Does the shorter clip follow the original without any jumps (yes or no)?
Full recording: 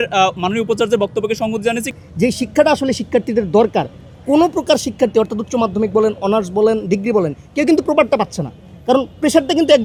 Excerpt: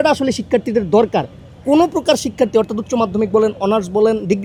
yes